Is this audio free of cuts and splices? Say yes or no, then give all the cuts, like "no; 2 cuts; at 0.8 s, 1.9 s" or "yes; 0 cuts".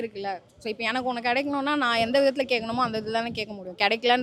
yes; 0 cuts